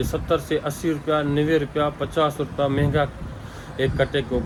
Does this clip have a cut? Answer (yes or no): no